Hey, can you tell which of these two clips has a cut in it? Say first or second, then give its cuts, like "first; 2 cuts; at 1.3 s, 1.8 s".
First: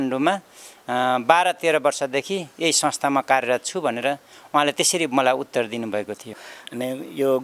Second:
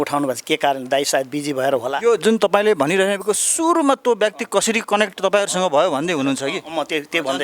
first; 1 cut; at 6.3 s